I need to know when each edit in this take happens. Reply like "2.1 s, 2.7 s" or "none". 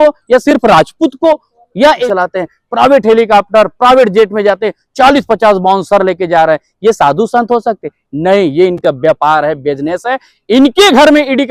2.0 s